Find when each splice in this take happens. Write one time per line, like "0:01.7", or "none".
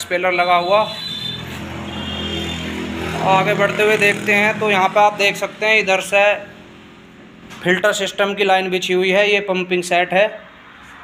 none